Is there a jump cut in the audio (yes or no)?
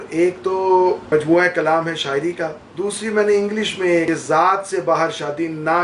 yes